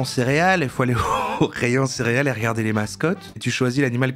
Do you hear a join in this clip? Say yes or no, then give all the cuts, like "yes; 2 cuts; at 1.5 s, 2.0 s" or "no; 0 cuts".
no; 0 cuts